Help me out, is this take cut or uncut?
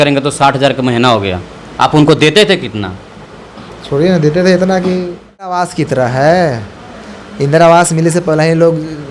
cut